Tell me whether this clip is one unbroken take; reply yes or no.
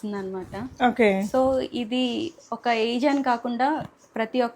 yes